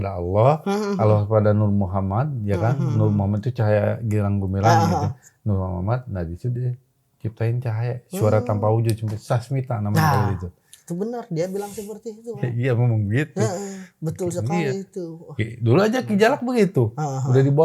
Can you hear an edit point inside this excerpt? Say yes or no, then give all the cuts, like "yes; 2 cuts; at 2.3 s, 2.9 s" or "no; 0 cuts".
no; 0 cuts